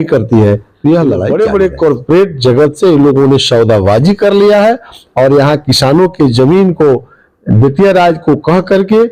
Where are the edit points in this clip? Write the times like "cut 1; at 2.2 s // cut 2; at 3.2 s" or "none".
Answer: cut 1; at 1.2 s